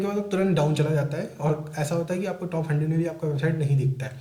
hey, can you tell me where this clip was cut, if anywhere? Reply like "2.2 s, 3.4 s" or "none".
none